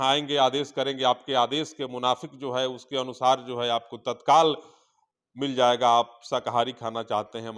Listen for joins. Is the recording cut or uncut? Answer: uncut